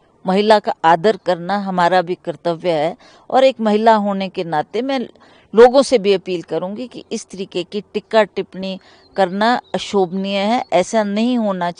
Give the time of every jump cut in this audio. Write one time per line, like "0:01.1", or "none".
none